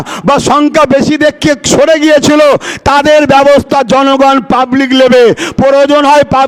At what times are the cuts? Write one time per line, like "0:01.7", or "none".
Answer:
none